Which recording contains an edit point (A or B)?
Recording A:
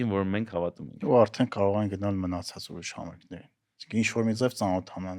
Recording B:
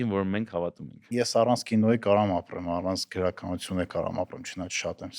B